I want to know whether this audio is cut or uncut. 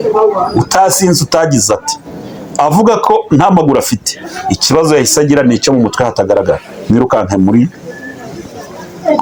uncut